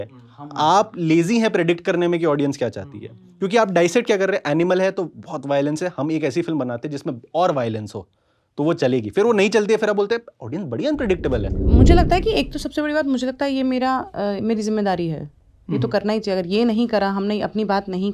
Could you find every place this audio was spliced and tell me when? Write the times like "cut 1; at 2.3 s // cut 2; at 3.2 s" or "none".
cut 1; at 11.6 s